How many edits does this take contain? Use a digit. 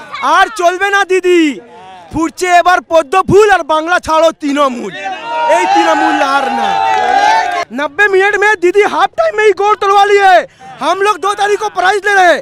1